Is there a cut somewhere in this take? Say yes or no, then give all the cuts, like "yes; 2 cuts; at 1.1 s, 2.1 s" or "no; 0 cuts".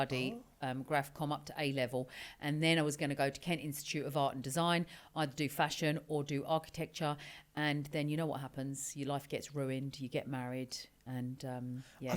no; 0 cuts